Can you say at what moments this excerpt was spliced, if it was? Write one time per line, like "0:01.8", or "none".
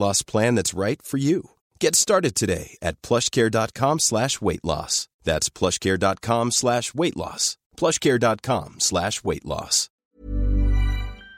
0:10.0